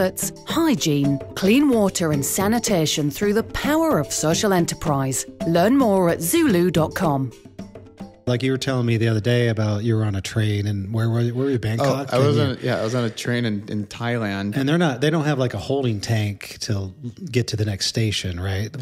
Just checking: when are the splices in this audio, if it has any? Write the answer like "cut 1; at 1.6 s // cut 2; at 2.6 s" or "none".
cut 1; at 8.3 s